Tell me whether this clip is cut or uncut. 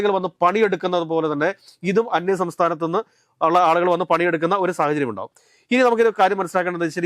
uncut